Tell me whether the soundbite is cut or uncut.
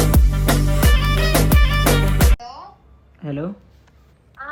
uncut